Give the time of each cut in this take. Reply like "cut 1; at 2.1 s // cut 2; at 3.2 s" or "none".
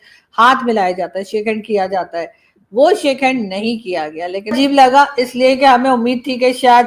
cut 1; at 4.5 s